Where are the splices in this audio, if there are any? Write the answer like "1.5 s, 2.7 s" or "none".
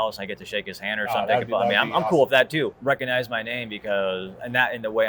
2.8 s